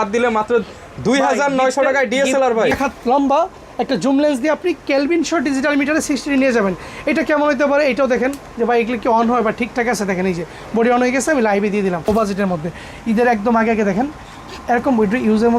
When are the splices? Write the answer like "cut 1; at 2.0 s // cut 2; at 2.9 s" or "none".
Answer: cut 1; at 2.7 s // cut 2; at 12.1 s